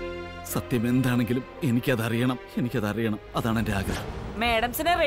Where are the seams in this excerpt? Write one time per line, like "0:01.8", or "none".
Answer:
0:04.0